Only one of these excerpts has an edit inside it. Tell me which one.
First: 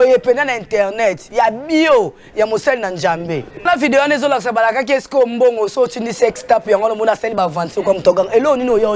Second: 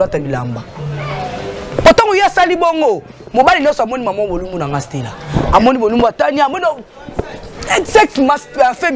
first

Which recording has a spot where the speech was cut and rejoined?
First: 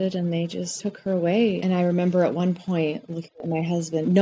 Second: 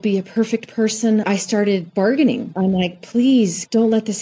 first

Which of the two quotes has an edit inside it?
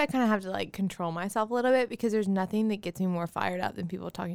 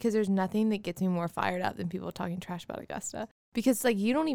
second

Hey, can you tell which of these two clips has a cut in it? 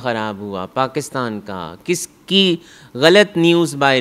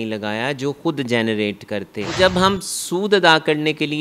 second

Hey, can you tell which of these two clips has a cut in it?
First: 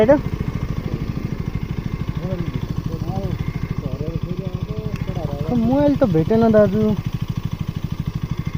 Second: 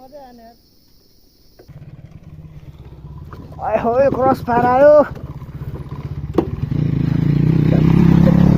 second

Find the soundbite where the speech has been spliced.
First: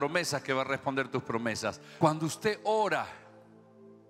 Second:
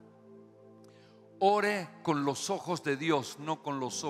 first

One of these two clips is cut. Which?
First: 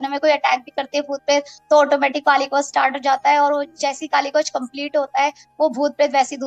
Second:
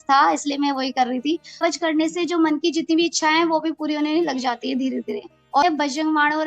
second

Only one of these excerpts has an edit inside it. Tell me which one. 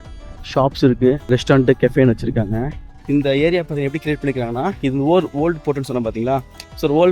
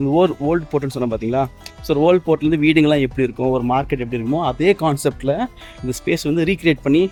first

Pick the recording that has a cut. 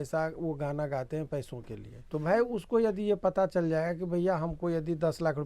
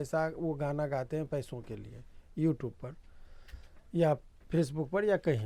first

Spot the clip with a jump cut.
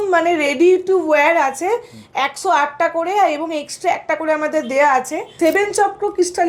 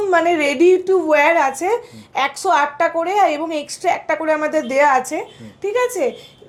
first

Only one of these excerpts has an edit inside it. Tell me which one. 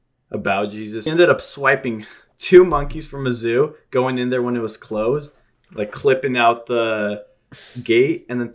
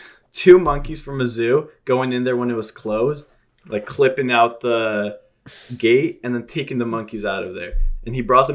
first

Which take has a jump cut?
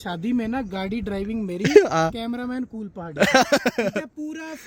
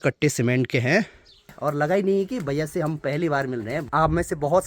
second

